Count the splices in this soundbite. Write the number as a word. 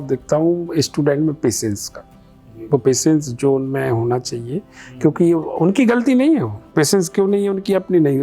one